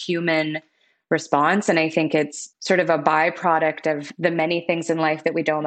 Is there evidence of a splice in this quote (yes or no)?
yes